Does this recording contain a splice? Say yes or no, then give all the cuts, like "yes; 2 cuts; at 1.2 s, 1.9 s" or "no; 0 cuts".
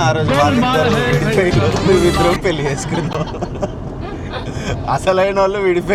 no; 0 cuts